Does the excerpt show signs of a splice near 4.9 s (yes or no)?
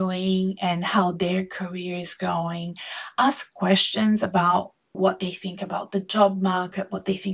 yes